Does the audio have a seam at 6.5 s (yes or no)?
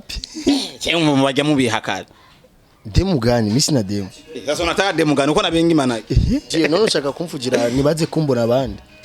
yes